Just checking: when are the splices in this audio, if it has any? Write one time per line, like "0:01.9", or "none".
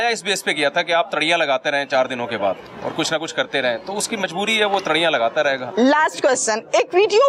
none